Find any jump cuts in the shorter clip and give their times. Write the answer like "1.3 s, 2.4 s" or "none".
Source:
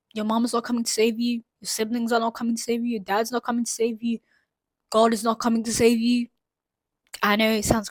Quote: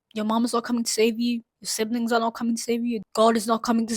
3.0 s